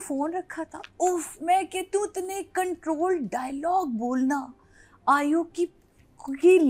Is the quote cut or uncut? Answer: uncut